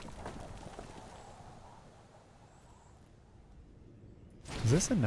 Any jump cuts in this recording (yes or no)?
no